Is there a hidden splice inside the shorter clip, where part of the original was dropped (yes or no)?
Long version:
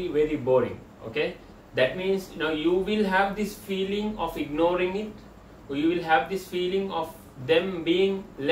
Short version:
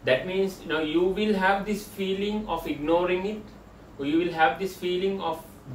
no